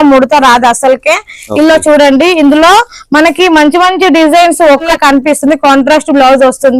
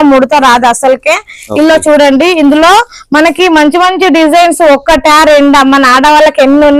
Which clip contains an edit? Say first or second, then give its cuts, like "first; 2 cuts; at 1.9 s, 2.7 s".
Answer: first; 1 cut; at 4.9 s